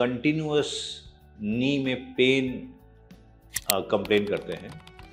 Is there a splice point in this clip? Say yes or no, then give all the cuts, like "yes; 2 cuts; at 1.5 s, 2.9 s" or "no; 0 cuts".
no; 0 cuts